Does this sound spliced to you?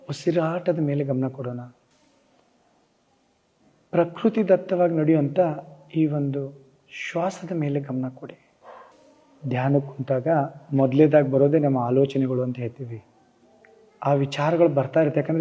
no; 0 cuts

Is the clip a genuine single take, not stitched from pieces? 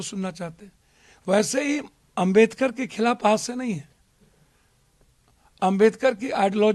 yes; 0 cuts

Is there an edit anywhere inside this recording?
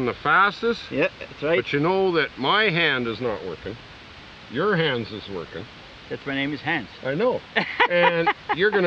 no; 0 cuts

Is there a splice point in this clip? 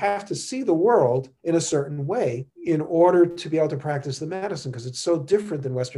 yes; 2 cuts; at 1.3 s, 2.5 s

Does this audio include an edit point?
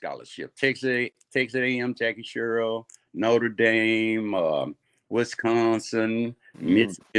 no; 0 cuts

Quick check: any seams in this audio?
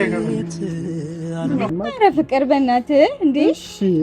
yes; 1 cut; at 1.7 s

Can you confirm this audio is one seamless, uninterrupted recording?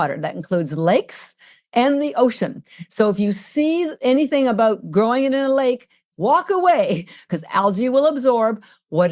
no; 2 cuts; at 6.0 s, 7.2 s

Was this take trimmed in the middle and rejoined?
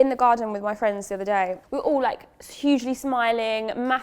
yes; 1 cut; at 1.6 s

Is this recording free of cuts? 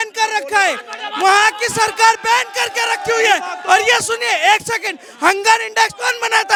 yes; 0 cuts

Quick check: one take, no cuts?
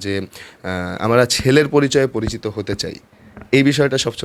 yes; 0 cuts

